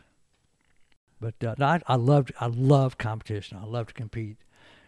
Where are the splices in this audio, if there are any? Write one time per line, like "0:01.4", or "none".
0:01.0